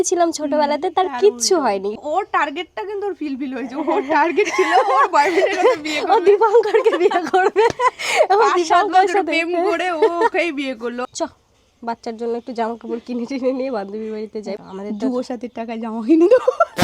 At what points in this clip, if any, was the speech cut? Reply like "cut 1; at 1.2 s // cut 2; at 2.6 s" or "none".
cut 1; at 2.0 s // cut 2; at 11.1 s // cut 3; at 14.6 s

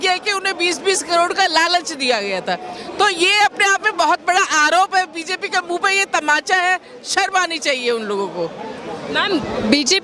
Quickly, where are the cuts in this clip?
none

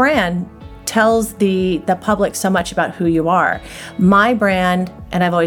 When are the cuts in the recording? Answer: none

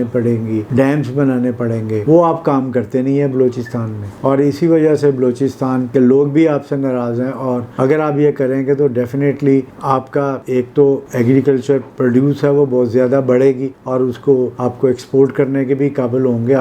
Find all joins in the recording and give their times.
none

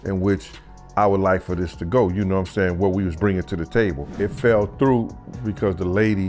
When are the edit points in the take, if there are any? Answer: cut 1; at 4.2 s

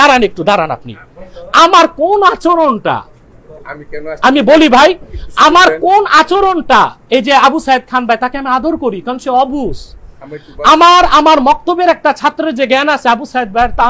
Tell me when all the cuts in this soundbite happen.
none

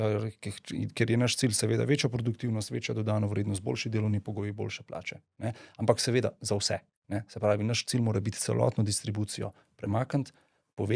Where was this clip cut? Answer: none

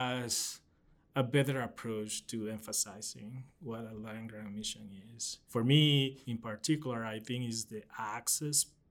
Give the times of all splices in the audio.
cut 1; at 5.4 s // cut 2; at 6.3 s

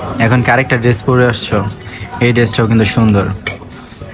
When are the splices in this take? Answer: none

